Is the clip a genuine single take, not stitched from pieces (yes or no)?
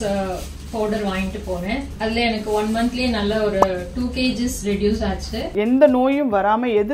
no